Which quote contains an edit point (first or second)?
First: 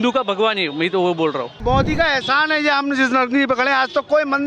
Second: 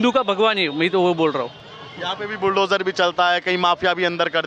first